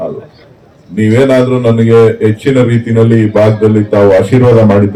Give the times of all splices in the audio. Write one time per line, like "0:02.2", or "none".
none